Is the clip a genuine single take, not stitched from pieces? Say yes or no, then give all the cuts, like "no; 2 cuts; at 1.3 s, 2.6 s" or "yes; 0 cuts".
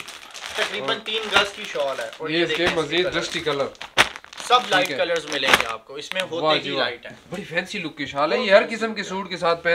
yes; 0 cuts